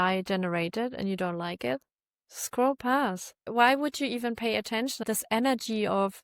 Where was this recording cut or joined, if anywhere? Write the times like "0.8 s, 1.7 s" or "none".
3.5 s, 5.0 s

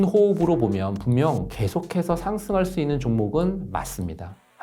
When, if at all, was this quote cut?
none

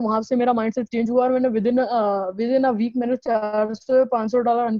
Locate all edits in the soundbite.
none

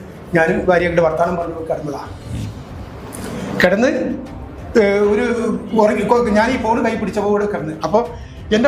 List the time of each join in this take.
none

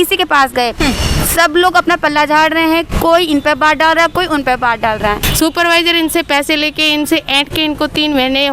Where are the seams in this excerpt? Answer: 5.2 s

